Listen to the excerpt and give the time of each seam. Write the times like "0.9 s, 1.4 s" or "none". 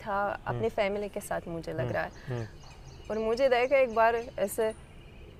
none